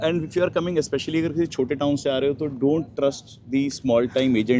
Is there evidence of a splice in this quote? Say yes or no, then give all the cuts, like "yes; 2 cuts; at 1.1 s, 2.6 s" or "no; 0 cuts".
no; 0 cuts